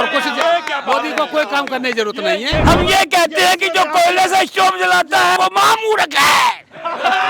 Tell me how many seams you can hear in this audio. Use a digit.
2